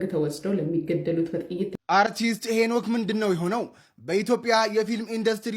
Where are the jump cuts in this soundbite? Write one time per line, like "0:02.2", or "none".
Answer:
0:01.7